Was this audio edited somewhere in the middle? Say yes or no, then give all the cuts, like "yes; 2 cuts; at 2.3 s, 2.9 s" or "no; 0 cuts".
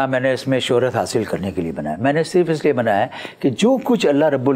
no; 0 cuts